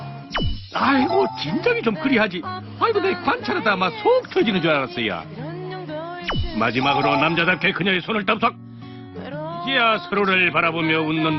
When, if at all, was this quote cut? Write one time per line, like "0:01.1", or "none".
none